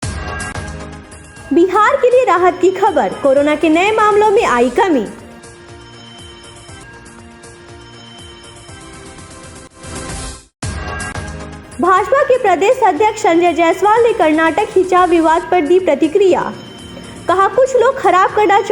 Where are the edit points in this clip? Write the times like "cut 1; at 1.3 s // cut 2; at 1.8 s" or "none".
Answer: cut 1; at 1.0 s